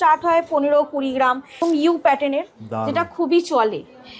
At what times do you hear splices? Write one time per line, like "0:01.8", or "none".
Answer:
0:01.6

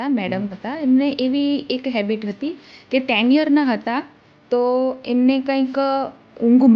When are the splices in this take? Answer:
none

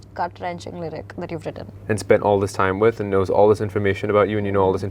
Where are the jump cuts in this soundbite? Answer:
0:01.7

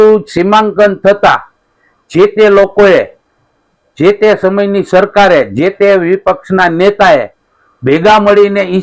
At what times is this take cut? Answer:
none

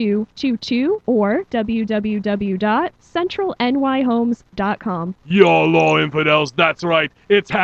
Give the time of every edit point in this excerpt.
0:05.1

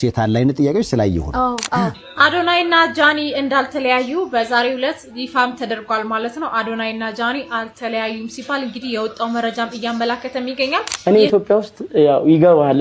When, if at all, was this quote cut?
0:02.0
0:10.9

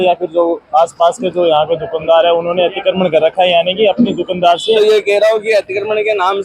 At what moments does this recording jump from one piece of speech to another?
0:04.8

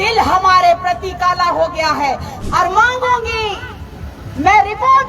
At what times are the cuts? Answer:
0:02.3

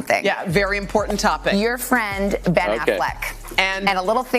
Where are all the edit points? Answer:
none

